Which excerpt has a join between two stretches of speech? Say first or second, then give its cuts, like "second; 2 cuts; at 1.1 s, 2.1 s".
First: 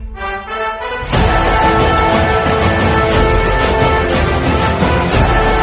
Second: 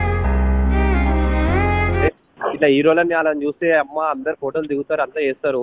second; 1 cut; at 2.0 s